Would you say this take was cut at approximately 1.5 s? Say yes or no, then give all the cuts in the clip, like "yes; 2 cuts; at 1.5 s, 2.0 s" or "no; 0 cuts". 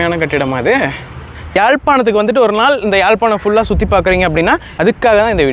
yes; 2 cuts; at 1.5 s, 4.6 s